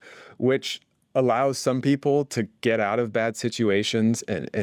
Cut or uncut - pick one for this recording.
uncut